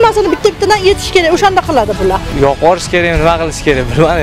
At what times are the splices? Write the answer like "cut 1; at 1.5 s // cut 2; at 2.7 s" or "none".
cut 1; at 2.3 s

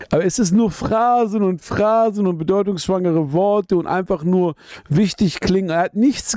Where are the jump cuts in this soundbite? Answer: none

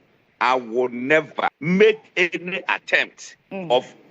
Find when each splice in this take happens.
cut 1; at 1.6 s

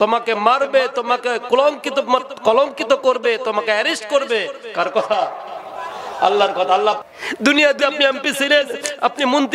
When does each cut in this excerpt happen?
cut 1; at 7.0 s

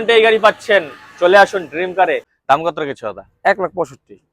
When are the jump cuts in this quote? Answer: cut 1; at 2.3 s

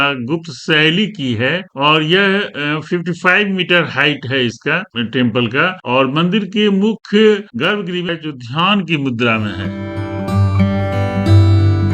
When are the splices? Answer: cut 1; at 8.1 s

